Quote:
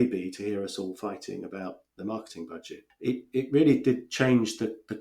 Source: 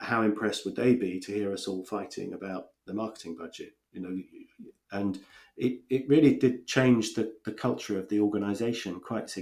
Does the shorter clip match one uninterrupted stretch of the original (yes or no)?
no